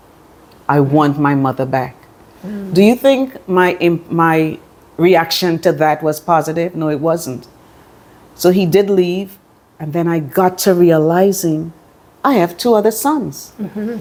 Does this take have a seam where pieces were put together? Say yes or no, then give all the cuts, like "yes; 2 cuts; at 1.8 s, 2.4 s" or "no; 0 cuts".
no; 0 cuts